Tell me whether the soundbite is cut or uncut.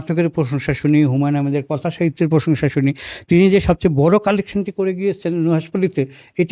uncut